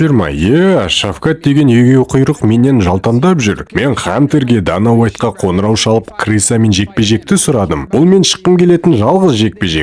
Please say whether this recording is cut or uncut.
uncut